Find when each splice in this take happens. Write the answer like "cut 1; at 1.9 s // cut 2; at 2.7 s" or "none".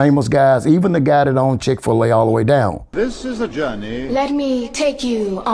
cut 1; at 2.9 s